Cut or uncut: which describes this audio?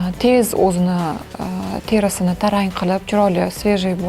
uncut